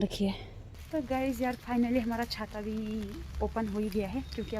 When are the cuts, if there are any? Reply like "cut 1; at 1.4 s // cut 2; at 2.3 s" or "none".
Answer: cut 1; at 1.0 s